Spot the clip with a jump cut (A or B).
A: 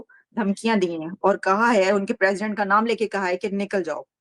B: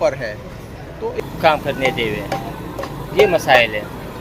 B